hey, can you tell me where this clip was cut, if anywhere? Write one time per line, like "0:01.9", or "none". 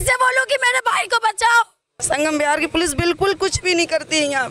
0:01.9